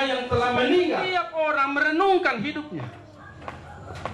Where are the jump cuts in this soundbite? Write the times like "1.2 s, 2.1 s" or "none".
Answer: 1.1 s

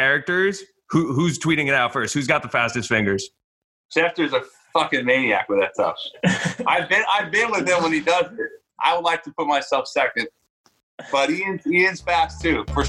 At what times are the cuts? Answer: 8.6 s

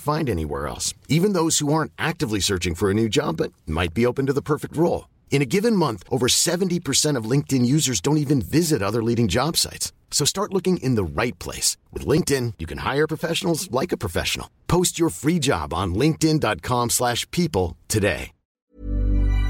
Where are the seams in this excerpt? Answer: 18.6 s

